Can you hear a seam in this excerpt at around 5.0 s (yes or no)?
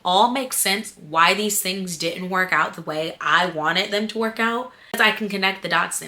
yes